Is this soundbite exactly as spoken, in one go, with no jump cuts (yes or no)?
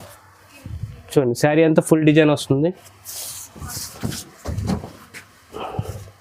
yes